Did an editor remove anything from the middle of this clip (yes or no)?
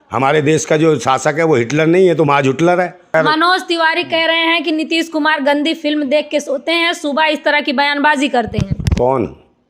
yes